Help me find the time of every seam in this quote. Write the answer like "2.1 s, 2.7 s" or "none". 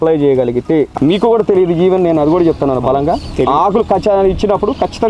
0.9 s